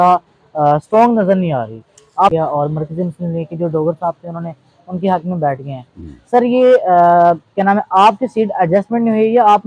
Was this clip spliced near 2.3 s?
yes; 1 cut; at 2.3 s

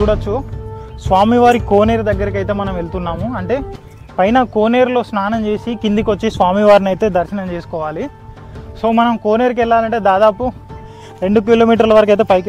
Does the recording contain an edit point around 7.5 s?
no; 0 cuts

